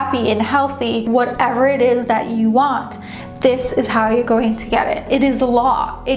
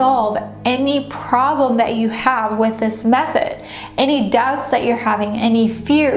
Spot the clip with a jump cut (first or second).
first